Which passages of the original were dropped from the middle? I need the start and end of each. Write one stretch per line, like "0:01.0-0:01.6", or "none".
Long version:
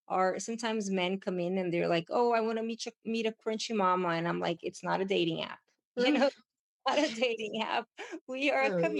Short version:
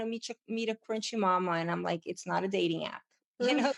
none